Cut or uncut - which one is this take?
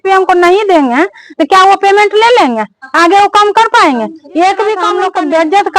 cut